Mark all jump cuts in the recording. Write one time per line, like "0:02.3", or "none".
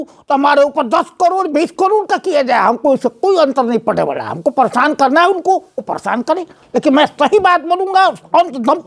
none

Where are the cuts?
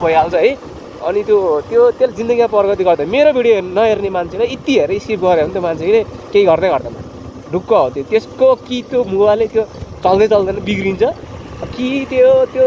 none

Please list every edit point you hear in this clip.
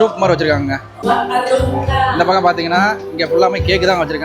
0:00.9

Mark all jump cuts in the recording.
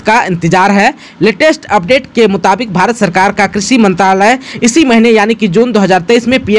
none

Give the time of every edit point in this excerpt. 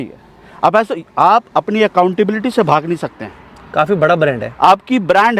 none

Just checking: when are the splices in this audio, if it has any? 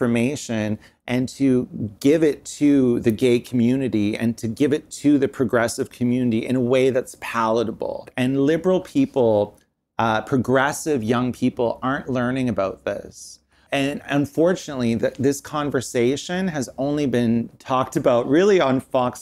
0:08.1
0:13.6

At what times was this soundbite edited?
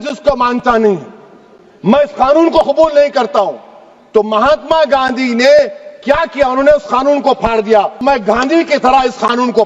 0:08.0

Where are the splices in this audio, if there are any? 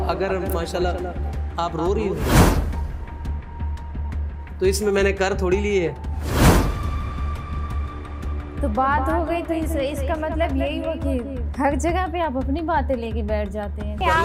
none

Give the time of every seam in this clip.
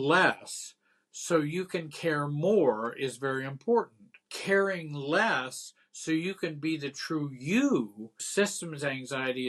0:08.2

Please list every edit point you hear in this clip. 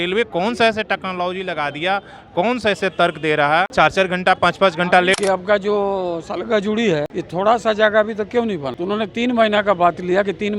0:03.7
0:05.2
0:07.2
0:08.7

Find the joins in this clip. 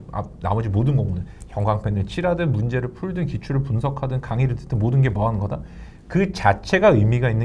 none

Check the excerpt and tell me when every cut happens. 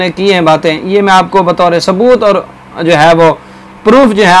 none

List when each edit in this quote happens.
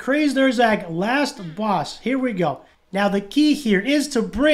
none

